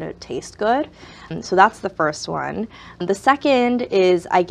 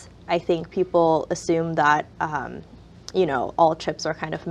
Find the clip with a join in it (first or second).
first